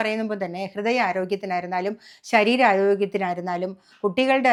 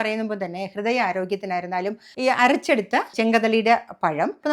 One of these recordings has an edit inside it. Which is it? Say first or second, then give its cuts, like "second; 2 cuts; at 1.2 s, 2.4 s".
second; 1 cut; at 2.1 s